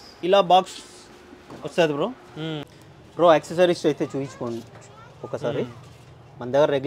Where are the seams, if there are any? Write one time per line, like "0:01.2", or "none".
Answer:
0:02.6